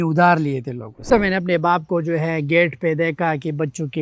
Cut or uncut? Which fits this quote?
cut